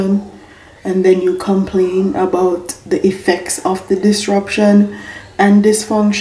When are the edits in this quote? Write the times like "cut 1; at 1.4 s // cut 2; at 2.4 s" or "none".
none